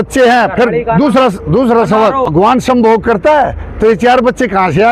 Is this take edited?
yes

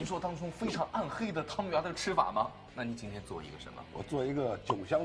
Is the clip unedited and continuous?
no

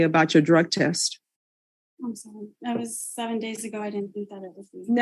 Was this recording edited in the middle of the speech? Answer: no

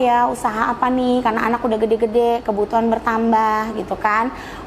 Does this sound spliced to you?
no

